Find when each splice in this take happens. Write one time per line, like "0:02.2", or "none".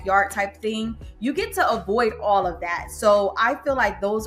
none